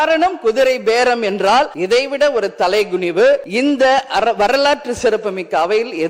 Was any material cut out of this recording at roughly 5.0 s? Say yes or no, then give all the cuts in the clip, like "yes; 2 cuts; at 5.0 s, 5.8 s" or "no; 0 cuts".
no; 2 cuts; at 1.8 s, 3.5 s